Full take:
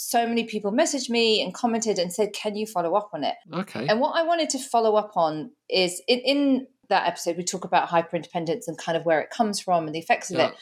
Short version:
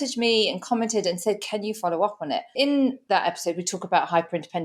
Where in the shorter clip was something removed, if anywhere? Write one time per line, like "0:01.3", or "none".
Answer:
0:02.8